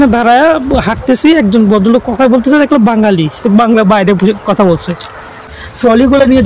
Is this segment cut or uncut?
cut